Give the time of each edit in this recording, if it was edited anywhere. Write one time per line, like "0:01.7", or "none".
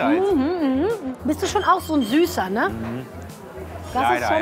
0:01.1